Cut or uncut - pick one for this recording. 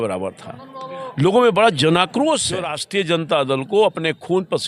cut